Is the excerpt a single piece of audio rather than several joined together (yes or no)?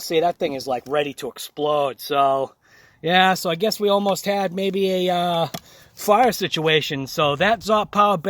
no